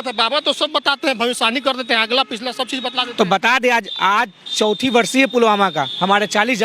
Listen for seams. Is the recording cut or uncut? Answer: uncut